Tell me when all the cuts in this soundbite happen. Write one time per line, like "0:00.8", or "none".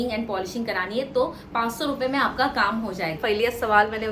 0:03.2

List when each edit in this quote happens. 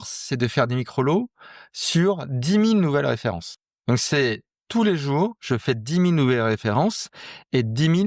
0:03.5

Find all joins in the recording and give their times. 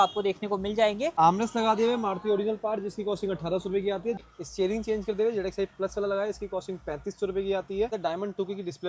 0:01.1
0:04.2
0:08.0

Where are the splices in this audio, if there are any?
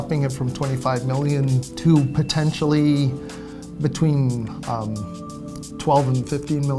none

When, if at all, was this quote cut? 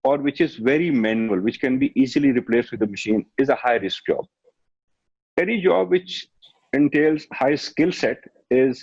none

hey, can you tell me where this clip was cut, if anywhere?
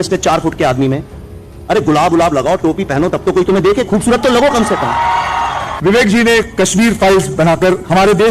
0:05.7

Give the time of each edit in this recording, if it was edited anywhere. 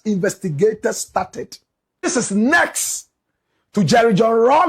0:02.1

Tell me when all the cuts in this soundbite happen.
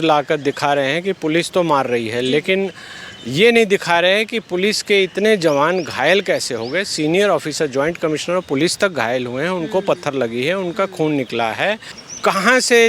none

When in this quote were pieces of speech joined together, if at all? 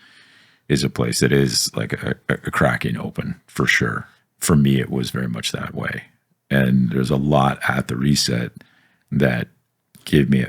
0:04.1

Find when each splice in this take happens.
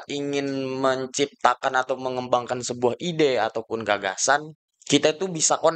none

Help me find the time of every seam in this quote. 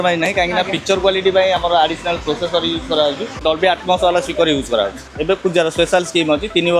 0:03.3
0:05.1

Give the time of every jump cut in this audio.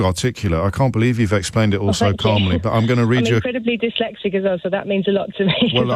none

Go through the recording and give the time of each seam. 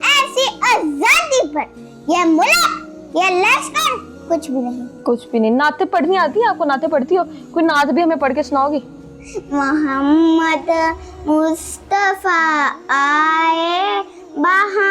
none

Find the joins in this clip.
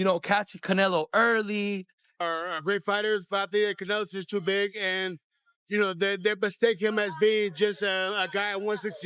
0:02.1

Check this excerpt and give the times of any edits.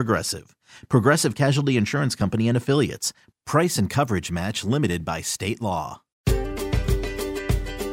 0:06.2

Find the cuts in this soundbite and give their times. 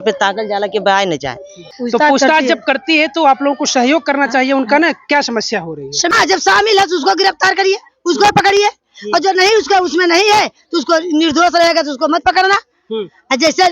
0:01.5
0:06.1

